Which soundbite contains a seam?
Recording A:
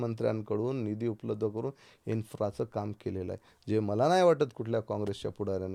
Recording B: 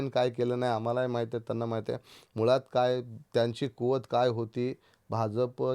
B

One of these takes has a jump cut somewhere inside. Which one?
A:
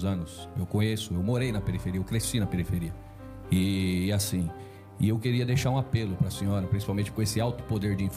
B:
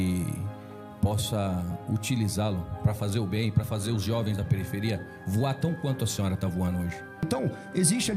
B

